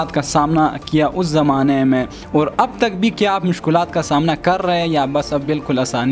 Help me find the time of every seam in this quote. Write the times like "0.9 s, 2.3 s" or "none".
none